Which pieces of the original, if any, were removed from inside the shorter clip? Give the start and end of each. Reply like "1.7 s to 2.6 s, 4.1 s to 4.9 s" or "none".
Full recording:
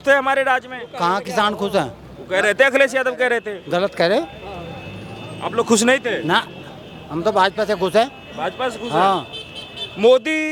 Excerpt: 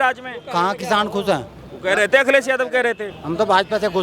3.5 s to 6.9 s

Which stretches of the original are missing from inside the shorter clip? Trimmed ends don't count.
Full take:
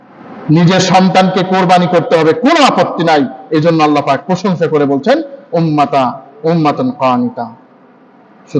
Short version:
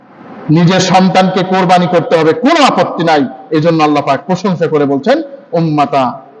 none

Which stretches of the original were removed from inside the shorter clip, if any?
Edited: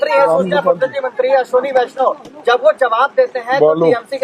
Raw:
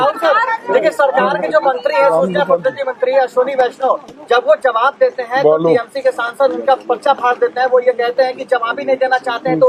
none

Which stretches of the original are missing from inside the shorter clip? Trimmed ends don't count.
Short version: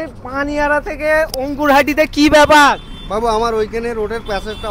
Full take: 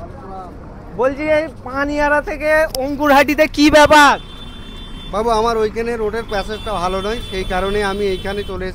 4.3 s to 5.0 s

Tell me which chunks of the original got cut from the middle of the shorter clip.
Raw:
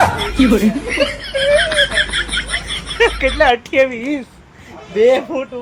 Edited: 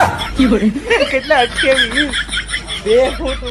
0.9 s to 3.0 s

